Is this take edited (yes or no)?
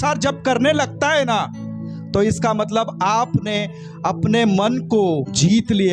no